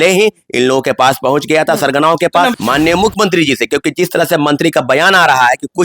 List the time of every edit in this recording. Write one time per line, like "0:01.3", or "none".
0:02.5